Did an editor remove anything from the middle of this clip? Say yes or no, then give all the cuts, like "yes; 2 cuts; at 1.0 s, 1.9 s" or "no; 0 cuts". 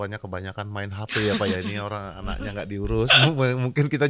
no; 0 cuts